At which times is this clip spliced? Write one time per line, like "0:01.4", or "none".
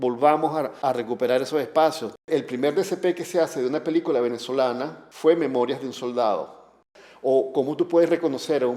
0:02.3
0:06.9